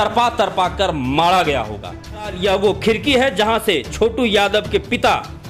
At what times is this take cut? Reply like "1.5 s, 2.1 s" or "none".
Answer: 2.3 s